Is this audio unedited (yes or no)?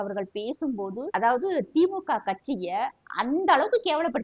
no